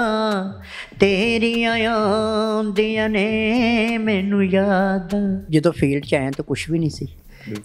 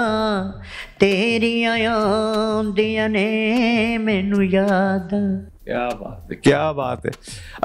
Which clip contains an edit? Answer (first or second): first